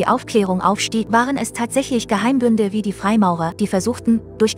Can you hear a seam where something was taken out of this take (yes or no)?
yes